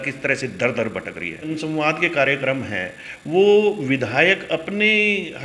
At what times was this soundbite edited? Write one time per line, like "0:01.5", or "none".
0:01.5

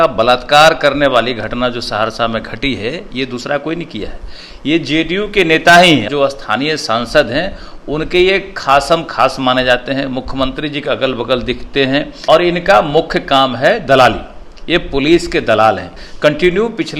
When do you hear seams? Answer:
0:06.1
0:12.1
0:16.0

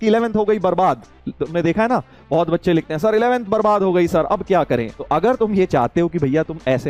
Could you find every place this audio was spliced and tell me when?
none

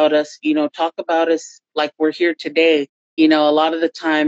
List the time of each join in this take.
0:03.0

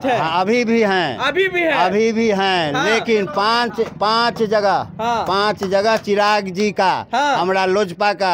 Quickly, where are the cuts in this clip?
none

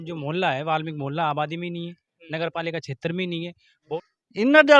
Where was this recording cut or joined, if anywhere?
0:03.9

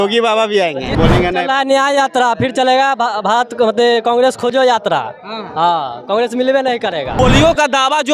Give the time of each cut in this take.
0:00.9
0:07.2

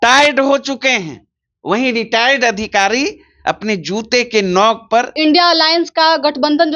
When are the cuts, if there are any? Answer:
0:05.1

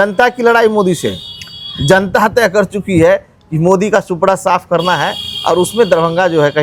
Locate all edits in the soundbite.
none

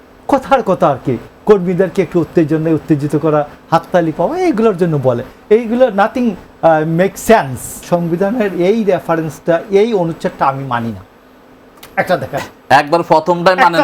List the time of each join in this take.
0:07.8

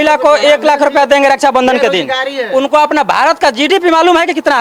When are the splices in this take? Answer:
none

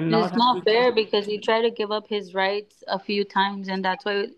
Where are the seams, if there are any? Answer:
none

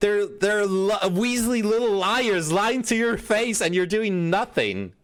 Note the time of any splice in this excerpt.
none

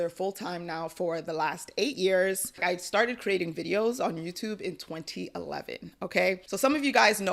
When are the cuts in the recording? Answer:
none

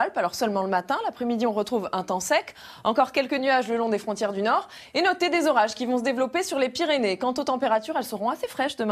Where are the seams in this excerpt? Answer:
none

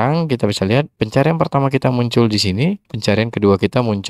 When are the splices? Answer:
0:00.9

